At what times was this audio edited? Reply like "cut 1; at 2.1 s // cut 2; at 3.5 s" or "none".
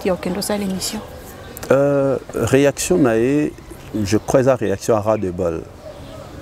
none